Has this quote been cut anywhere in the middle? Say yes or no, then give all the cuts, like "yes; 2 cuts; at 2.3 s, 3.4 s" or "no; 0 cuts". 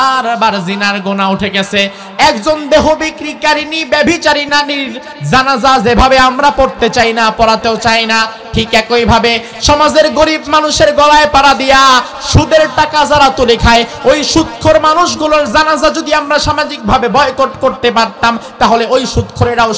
yes; 2 cuts; at 2.0 s, 4.5 s